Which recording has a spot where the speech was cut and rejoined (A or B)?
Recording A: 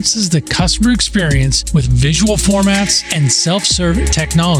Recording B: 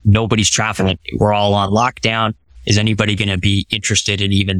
B